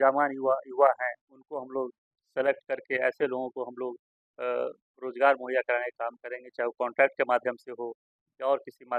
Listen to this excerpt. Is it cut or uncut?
uncut